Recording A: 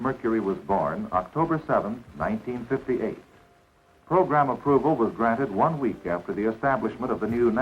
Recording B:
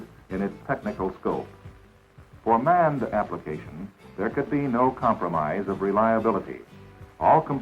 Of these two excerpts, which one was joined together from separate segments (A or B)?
B